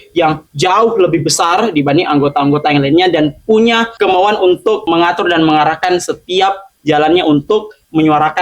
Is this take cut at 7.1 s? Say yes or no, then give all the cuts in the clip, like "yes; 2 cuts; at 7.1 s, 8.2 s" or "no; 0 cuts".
no; 0 cuts